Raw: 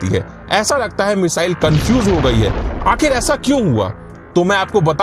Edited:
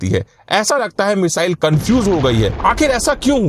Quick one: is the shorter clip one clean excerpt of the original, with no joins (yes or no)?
no